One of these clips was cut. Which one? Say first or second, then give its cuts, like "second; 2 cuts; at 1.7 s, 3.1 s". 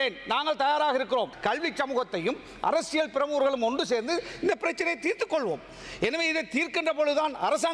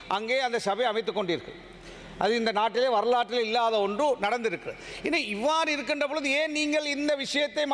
first; 1 cut; at 1.3 s